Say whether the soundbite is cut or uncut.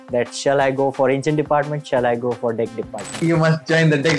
cut